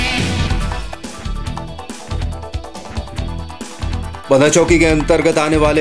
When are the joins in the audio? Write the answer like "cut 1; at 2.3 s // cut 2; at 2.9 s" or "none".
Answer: cut 1; at 4.2 s